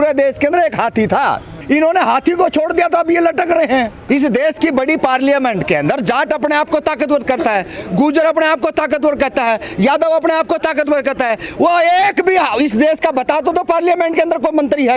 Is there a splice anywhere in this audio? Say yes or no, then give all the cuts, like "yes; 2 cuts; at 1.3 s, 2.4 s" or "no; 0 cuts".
yes; 2 cuts; at 1.5 s, 4.0 s